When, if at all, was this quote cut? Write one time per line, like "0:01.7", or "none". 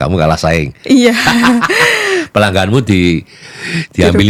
none